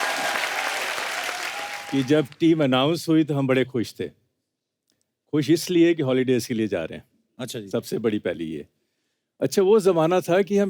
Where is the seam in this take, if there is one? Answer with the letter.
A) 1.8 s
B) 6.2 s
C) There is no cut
A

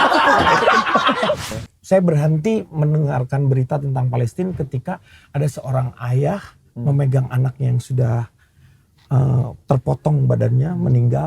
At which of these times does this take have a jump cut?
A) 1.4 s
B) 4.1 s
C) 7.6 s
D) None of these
A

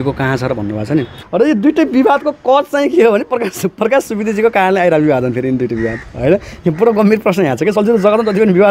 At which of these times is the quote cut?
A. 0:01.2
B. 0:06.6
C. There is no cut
A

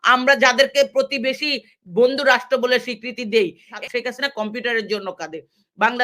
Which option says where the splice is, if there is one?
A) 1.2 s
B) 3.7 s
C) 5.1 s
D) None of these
B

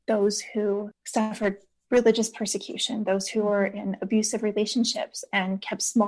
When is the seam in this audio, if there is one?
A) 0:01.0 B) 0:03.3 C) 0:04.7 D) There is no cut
A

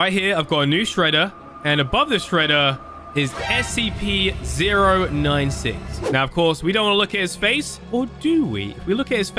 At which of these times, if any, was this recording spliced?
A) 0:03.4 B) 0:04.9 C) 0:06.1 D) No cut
C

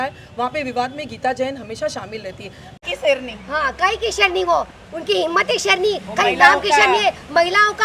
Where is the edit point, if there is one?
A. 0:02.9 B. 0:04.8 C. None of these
A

